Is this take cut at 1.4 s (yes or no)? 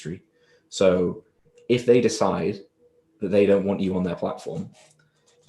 no